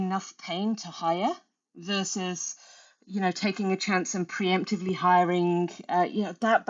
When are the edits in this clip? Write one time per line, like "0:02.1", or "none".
none